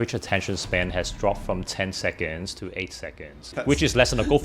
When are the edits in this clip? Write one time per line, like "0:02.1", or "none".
0:03.5